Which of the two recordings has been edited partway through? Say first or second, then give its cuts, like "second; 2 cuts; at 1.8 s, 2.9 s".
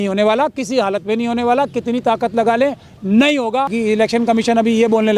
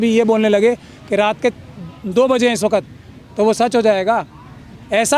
first; 1 cut; at 3.7 s